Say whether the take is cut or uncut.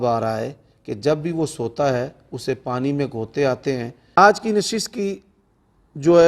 cut